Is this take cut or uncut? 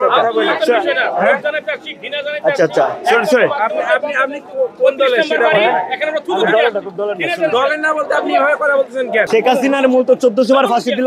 cut